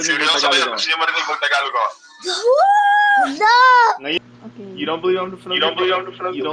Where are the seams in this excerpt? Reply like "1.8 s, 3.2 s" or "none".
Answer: 4.2 s

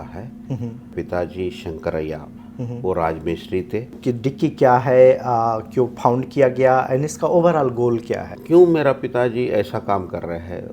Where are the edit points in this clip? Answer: 0.9 s, 3.9 s, 8.3 s

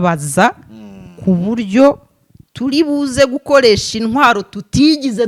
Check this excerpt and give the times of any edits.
none

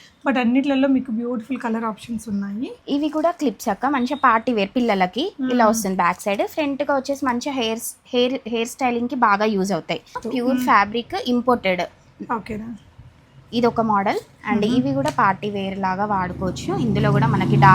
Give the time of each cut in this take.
2.8 s, 10.2 s

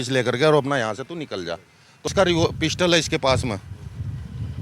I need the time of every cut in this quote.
2.1 s

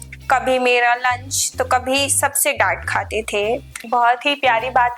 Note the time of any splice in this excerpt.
3.8 s

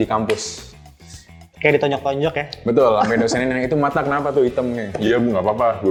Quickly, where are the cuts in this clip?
none

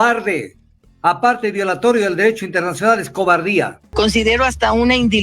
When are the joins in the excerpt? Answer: 3.8 s

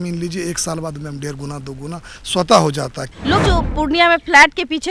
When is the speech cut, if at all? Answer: 3.0 s

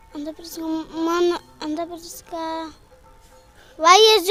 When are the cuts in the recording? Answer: none

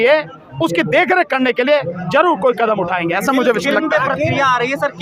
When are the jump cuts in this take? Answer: none

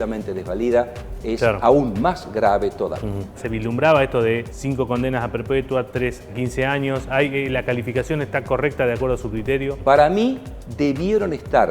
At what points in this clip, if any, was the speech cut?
3.4 s, 4.5 s, 6.3 s, 9.8 s

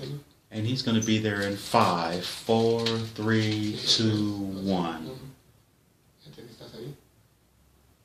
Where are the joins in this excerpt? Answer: none

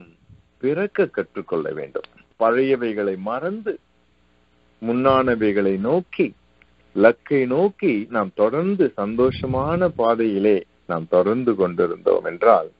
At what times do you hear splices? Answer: 2.2 s

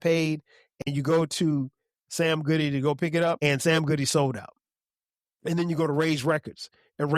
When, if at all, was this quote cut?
3.4 s

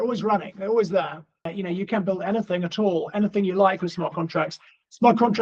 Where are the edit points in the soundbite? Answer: 1.5 s

